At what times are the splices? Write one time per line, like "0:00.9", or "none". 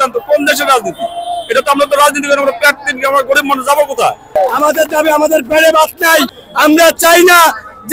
0:04.4
0:06.3